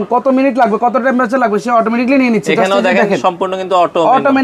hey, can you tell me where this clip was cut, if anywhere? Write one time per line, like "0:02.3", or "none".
none